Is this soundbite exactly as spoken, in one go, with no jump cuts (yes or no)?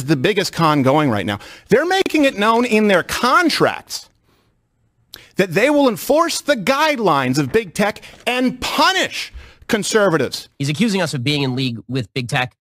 no